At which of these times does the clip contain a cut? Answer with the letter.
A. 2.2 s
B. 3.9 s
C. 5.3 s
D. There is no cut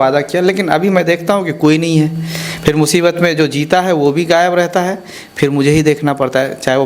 D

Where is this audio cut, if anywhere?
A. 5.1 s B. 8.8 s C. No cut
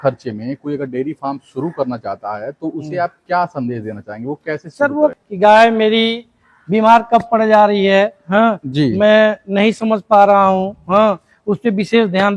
A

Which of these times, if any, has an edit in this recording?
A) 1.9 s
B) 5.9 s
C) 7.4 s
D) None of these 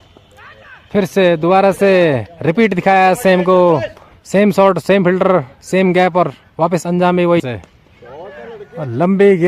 C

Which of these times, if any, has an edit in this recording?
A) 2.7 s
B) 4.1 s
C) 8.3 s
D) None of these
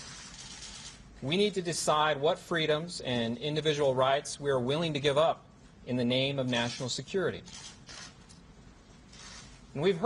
B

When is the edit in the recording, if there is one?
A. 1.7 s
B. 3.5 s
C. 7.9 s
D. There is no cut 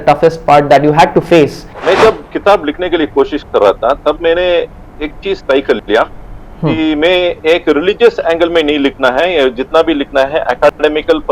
A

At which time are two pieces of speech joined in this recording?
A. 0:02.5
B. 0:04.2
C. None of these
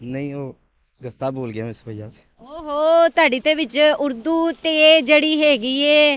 C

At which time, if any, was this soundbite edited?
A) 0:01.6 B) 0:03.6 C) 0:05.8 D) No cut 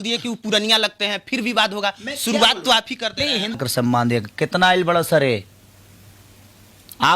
B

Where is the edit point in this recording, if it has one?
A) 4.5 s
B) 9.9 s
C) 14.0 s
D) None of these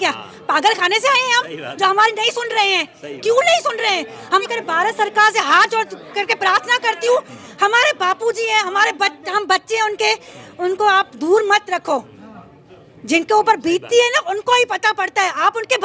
A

